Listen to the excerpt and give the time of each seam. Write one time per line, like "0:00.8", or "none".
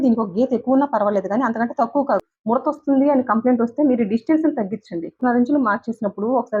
0:02.3
0:05.2